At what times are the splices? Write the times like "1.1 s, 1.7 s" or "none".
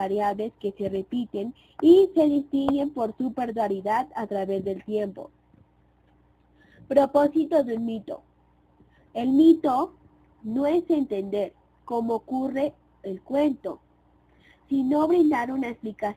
5.7 s